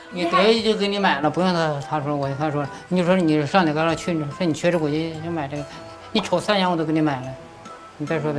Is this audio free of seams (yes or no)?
yes